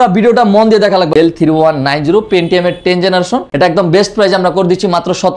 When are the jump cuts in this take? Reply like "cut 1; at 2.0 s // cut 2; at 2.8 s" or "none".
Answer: cut 1; at 1.1 s // cut 2; at 3.5 s